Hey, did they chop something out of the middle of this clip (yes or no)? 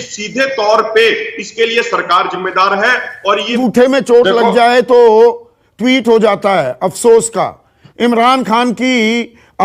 yes